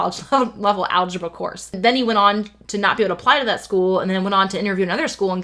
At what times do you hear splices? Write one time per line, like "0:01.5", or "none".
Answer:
0:01.8